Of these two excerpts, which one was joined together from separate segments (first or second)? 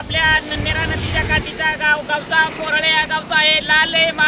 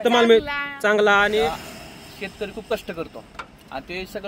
second